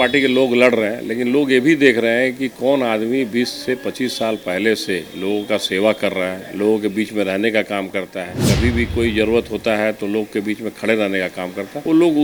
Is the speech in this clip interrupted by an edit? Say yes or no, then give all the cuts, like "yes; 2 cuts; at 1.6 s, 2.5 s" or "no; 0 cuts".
no; 0 cuts